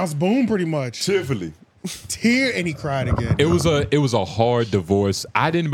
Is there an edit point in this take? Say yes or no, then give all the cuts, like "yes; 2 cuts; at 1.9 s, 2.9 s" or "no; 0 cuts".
no; 0 cuts